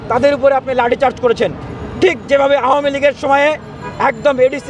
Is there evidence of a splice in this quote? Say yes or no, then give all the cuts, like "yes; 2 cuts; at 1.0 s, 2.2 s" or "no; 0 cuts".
no; 0 cuts